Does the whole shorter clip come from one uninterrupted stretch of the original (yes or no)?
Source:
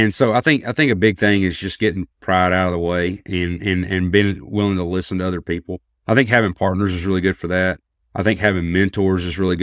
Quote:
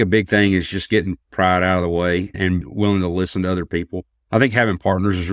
no